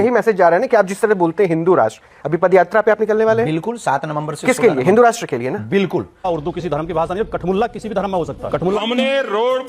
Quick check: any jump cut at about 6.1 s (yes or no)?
yes